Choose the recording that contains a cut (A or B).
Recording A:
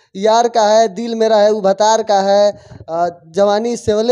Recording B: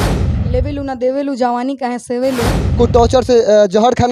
B